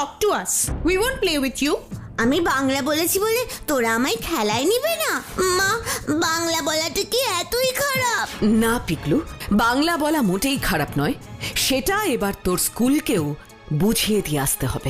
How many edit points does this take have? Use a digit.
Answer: 3